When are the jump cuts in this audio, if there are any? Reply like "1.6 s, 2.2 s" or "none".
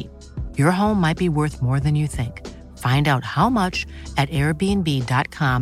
none

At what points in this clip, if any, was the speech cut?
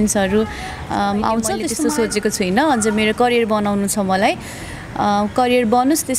1.7 s

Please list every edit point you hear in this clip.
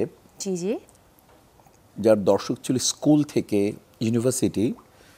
none

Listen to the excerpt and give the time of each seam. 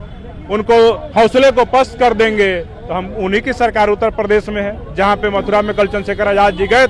none

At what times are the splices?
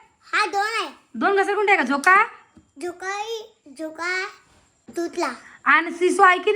4.8 s

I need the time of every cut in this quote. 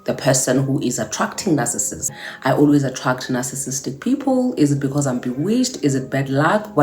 2.1 s

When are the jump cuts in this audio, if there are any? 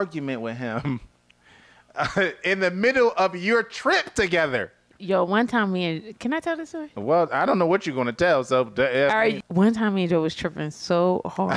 none

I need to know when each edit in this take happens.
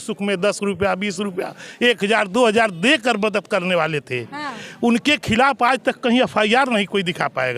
none

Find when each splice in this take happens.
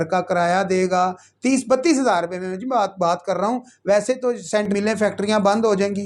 4.7 s

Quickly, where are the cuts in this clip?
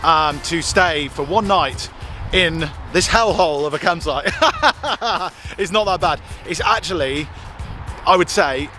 none

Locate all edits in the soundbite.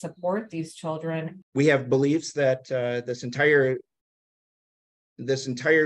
1.4 s

